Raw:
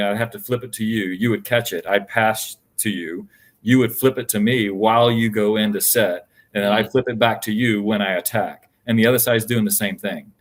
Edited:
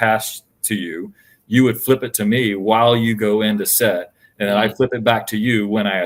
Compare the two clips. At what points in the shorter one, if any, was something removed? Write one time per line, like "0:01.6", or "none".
none